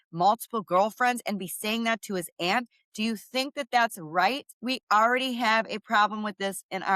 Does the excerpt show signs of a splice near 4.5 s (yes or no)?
yes